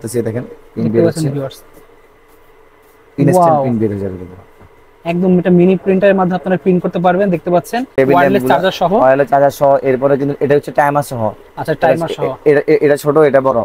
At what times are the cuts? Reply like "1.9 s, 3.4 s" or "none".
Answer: 7.9 s